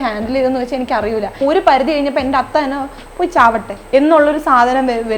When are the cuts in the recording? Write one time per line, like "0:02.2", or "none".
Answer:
0:01.4
0:03.7

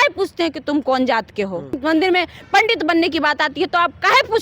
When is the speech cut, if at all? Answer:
0:01.8

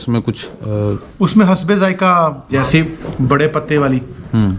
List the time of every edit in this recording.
0:02.5

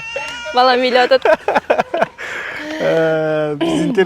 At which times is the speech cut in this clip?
none

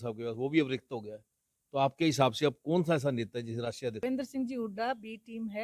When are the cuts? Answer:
0:04.0

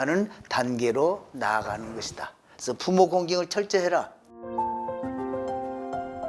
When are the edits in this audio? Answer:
none

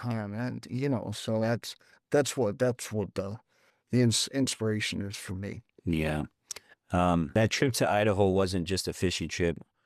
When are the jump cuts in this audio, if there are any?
0:07.3

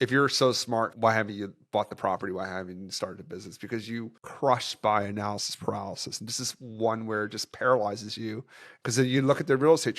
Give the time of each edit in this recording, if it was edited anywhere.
0:00.9
0:08.6

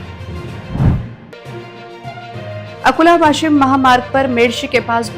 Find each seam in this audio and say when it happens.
0:01.2

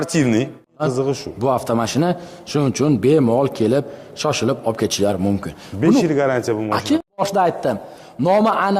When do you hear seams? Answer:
0:00.8
0:07.2

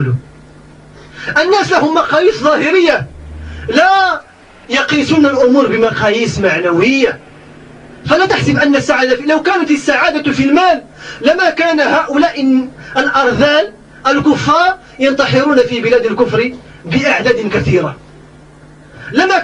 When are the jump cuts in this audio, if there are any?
none

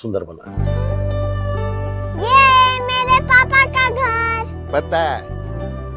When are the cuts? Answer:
none

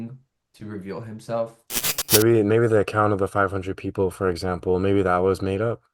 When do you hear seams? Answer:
0:01.7

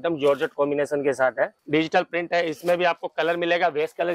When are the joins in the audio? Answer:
0:01.6

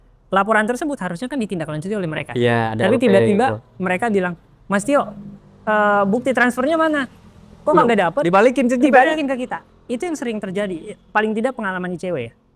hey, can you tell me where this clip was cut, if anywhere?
none

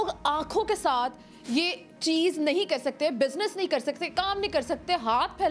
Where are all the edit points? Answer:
none

